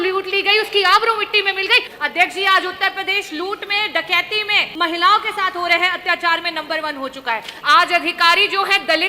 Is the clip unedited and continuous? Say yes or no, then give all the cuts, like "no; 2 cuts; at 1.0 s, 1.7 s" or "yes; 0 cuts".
no; 3 cuts; at 1.9 s, 4.7 s, 7.5 s